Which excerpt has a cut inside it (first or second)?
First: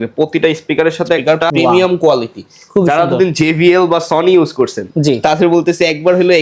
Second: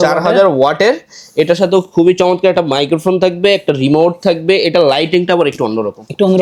first